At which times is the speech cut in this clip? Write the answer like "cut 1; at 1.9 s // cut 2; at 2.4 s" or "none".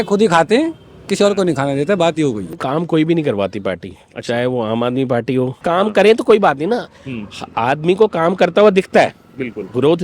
cut 1; at 2.5 s // cut 2; at 5.6 s